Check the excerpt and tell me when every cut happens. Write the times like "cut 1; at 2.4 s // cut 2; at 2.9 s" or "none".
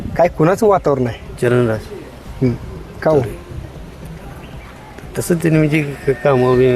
cut 1; at 1.2 s